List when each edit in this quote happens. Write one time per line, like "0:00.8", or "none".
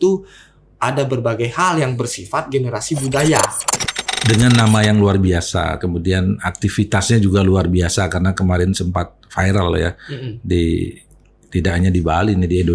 0:03.6